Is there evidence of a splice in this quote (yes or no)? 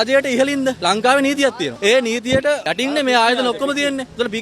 yes